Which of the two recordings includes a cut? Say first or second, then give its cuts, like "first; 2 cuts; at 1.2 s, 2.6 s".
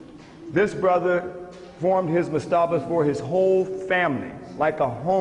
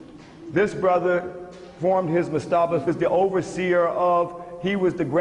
first; 1 cut; at 2.8 s